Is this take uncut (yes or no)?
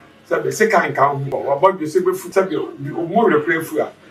no